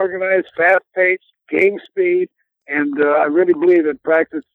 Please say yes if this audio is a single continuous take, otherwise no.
no